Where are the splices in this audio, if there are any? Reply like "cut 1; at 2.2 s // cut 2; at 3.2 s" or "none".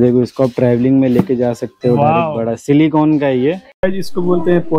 cut 1; at 3.8 s